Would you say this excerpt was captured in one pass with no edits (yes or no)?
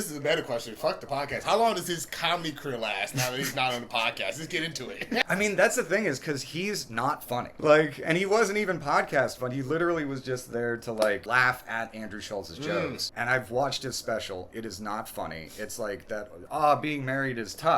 no